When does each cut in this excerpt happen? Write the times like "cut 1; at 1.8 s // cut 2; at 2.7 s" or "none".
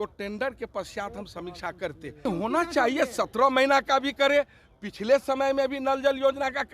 cut 1; at 2.3 s